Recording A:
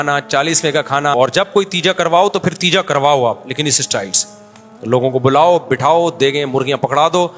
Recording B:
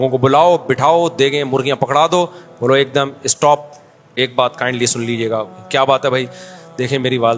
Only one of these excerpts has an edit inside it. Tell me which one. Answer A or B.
A